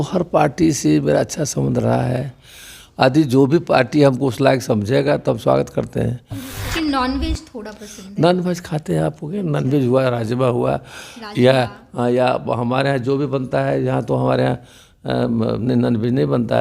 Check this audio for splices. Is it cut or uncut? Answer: cut